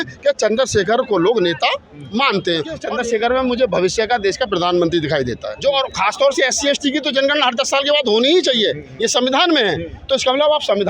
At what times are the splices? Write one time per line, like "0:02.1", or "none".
0:02.8
0:05.5